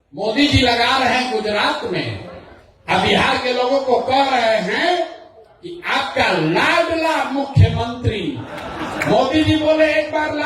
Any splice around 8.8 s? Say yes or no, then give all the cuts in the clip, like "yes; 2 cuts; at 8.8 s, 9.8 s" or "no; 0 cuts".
yes; 1 cut; at 8.8 s